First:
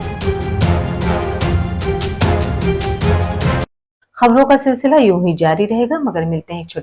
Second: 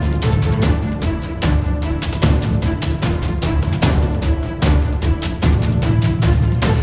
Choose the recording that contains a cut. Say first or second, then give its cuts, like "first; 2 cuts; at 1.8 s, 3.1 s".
first; 1 cut; at 3.5 s